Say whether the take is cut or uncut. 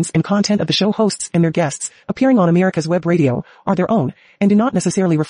uncut